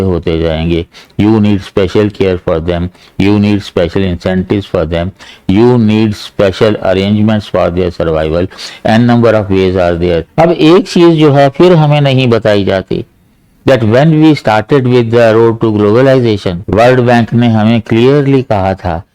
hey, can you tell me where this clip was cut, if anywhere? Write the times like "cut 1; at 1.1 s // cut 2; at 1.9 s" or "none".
cut 1; at 10.3 s // cut 2; at 16.5 s